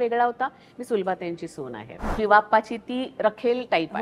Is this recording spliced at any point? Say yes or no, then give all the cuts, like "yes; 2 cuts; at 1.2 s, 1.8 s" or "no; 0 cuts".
yes; 1 cut; at 2.1 s